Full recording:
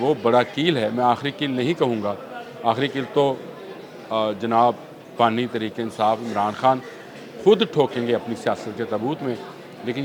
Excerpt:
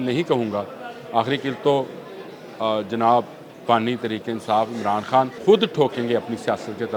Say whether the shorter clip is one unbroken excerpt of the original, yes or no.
no